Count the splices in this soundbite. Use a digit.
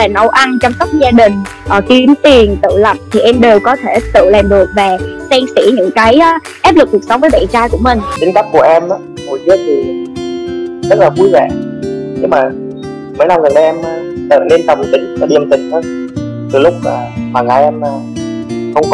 1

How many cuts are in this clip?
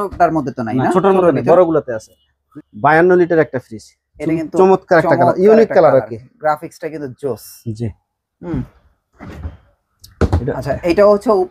1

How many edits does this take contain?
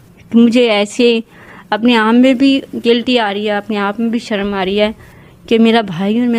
0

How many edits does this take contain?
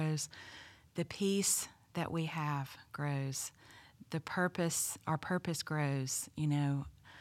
0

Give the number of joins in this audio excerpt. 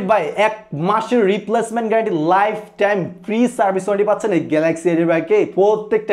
0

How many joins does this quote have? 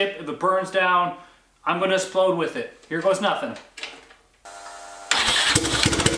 1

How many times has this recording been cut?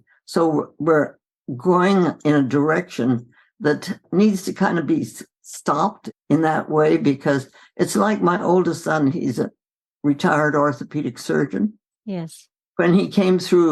2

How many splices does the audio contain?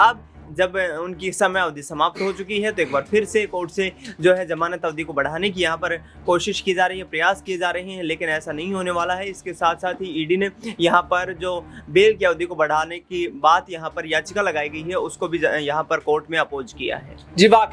0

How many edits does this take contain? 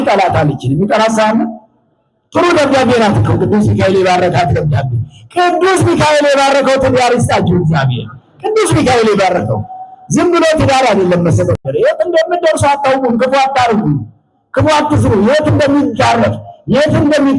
1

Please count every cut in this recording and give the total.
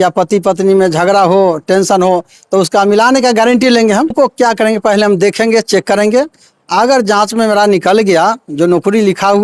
1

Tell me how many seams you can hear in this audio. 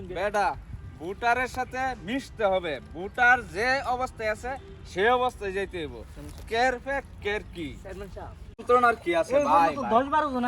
1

